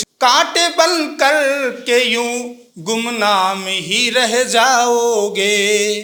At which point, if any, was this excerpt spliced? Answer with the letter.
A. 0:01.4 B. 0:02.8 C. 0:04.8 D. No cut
D